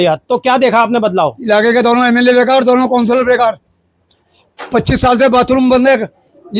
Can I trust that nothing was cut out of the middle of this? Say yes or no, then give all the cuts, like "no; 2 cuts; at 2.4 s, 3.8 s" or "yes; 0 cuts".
yes; 0 cuts